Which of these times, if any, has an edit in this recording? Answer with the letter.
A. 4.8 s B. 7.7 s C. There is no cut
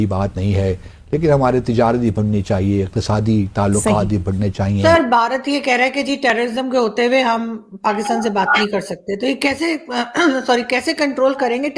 A